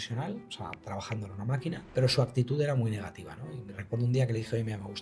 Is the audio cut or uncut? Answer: cut